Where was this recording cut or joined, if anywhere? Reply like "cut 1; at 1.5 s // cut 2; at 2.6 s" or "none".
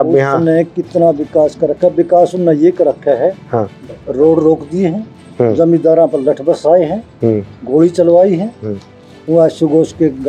none